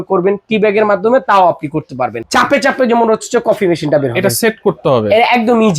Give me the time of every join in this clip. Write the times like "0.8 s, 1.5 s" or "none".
2.2 s

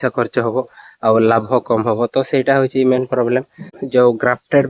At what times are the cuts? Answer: 3.7 s

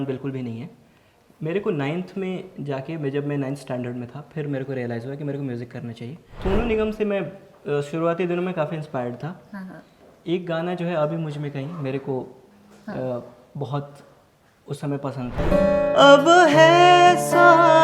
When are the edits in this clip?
6.3 s, 15.3 s

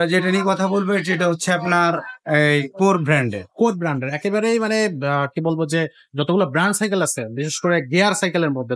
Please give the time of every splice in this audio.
none

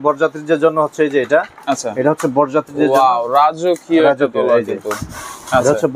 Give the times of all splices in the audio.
none

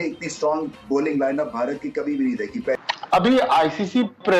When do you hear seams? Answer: 2.8 s

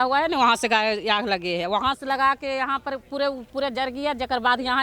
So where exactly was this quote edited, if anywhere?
none

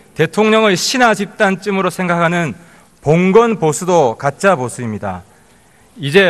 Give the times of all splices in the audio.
4.3 s

